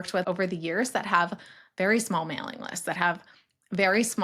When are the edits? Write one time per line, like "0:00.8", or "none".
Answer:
none